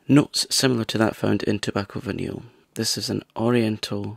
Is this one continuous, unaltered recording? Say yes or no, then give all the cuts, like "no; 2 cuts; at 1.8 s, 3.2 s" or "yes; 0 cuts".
no; 1 cut; at 2.5 s